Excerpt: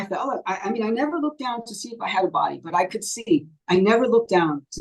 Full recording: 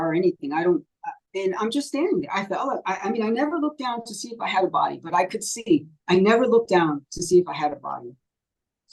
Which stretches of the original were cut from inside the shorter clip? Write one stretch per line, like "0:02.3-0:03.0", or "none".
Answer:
none